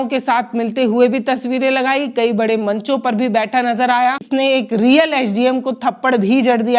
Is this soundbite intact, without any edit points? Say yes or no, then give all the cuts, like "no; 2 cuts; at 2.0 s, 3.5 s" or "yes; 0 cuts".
no; 1 cut; at 4.3 s